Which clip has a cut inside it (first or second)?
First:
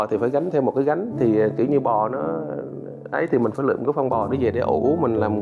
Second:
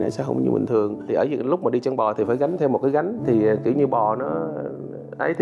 second